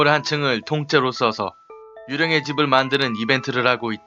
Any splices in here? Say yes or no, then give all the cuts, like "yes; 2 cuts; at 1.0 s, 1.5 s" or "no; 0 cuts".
yes; 1 cut; at 1.4 s